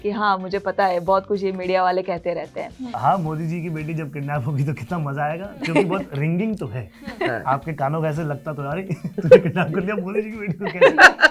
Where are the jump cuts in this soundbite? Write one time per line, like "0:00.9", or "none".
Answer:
0:02.8